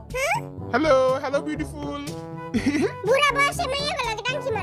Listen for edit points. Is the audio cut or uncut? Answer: uncut